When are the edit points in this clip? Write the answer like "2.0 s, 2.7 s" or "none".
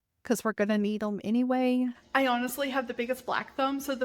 2.0 s

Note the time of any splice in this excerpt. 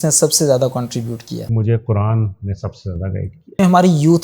1.5 s, 3.6 s

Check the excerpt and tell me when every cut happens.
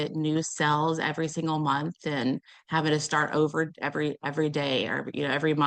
none

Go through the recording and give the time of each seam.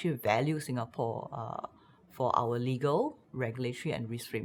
none

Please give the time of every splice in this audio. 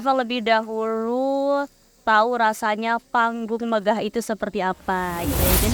none

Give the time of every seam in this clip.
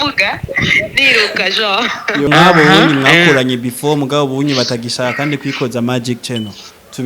2.3 s

